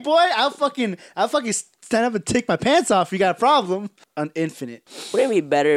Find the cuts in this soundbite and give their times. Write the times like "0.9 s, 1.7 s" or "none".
4.5 s